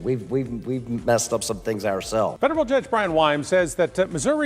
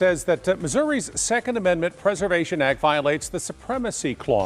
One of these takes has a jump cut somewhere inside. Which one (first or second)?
first